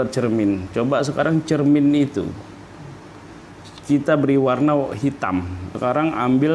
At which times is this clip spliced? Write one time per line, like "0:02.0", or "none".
0:03.7
0:05.7